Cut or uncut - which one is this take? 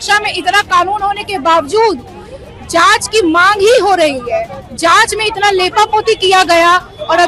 uncut